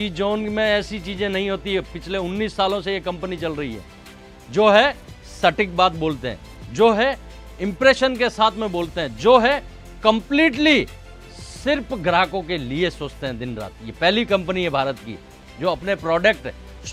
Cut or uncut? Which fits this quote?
uncut